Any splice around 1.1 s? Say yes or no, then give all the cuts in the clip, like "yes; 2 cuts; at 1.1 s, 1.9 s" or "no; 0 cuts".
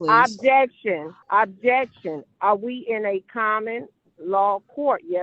yes; 1 cut; at 1.1 s